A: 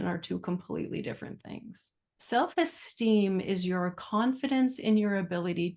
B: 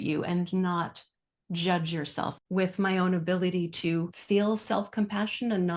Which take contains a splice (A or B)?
B